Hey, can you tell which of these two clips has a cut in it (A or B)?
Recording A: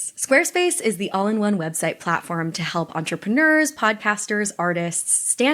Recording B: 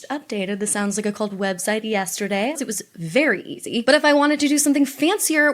B